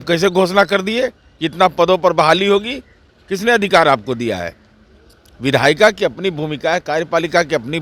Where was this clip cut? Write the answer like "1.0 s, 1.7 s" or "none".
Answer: none